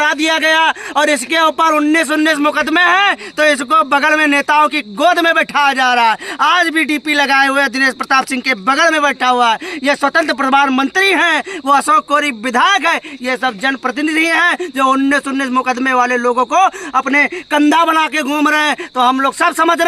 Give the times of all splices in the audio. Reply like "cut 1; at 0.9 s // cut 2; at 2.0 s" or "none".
none